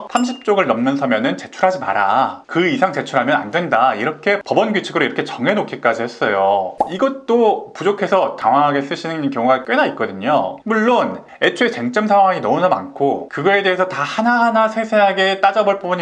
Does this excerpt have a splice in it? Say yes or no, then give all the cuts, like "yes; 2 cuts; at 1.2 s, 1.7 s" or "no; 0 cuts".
no; 0 cuts